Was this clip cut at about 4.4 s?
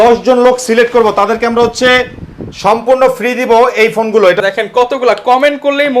yes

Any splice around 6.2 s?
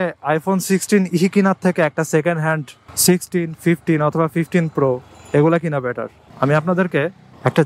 yes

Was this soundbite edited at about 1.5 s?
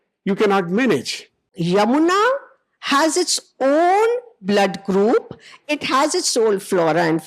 yes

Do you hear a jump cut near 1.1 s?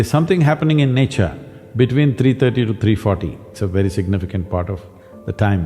no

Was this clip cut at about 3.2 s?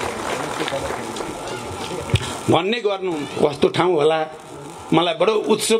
yes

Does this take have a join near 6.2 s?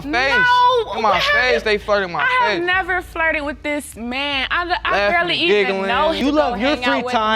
yes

